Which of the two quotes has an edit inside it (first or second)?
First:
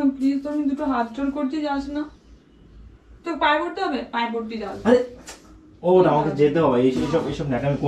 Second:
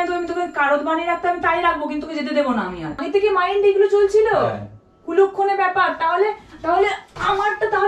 second